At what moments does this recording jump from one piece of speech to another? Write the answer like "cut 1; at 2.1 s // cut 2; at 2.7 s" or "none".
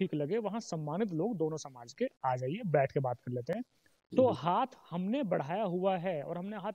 none

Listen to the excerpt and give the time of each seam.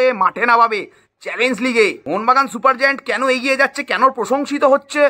cut 1; at 2.0 s

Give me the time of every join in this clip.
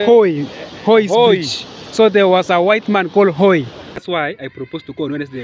cut 1; at 4.0 s

